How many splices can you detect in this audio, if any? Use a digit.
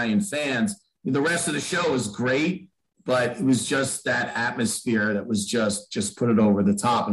0